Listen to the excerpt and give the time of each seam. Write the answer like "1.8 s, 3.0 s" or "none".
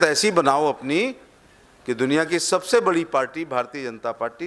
none

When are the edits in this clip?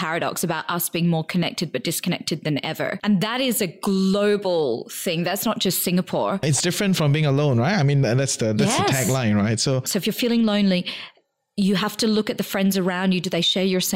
3.0 s, 6.4 s, 9.9 s

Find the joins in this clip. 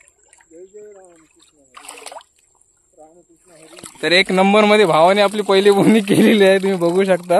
none

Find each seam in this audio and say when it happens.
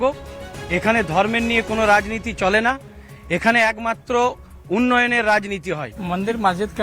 none

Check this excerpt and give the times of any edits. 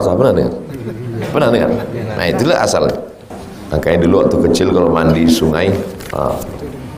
3.4 s

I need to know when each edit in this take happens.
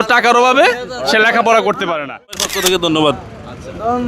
2.4 s

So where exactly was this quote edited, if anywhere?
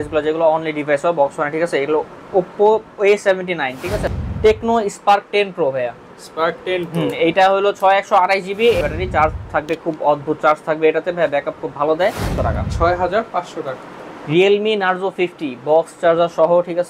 4.1 s, 8.8 s, 12.3 s

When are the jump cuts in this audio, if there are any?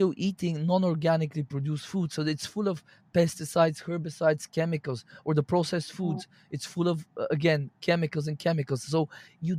none

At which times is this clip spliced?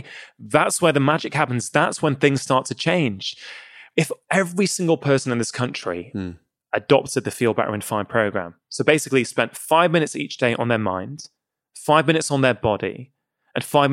3.9 s

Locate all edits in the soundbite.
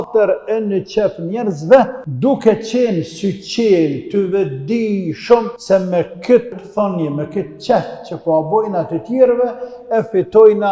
2.0 s, 5.5 s, 6.6 s

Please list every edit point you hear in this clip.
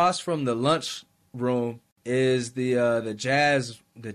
1.9 s

